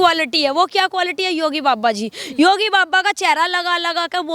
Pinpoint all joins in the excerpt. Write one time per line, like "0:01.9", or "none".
none